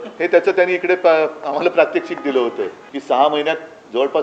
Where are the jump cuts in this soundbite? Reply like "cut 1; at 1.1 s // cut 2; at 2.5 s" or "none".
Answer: cut 1; at 2.8 s